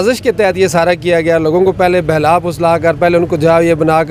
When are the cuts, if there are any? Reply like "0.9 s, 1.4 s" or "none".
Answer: none